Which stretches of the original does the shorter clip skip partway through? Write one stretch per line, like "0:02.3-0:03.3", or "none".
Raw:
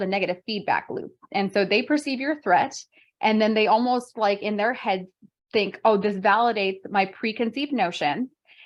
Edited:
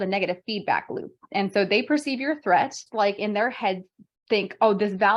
0:02.9-0:04.1